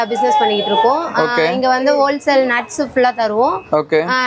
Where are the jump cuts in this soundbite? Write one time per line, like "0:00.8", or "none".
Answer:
none